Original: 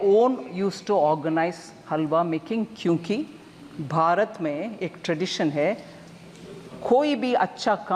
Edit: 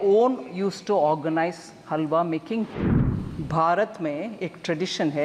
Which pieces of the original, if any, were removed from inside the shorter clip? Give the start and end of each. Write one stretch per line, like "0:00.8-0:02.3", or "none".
0:02.8-0:03.2